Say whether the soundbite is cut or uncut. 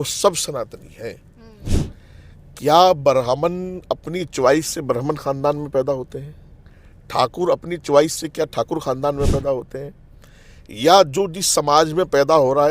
cut